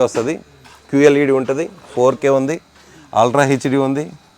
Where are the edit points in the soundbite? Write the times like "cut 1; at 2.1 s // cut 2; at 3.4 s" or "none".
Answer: none